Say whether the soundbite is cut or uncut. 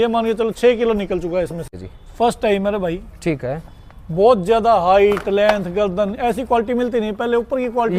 cut